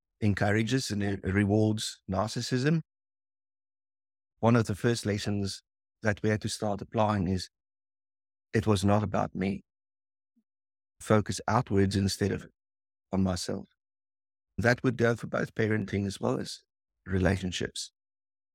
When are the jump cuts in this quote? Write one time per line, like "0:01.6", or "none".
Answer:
0:04.4
0:11.0
0:14.6